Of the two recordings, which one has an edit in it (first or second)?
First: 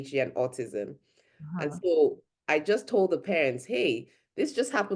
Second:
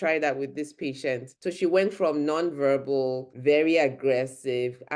second